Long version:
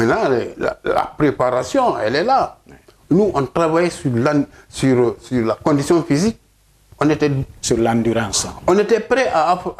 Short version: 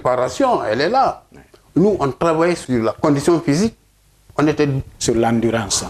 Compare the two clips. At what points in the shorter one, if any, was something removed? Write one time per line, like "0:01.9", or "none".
0:02.6